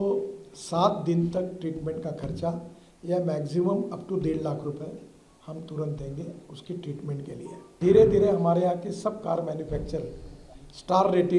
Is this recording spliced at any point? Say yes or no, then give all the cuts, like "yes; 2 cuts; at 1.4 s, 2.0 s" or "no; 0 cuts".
yes; 1 cut; at 7.8 s